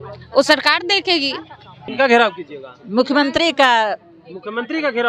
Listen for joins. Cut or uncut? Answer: cut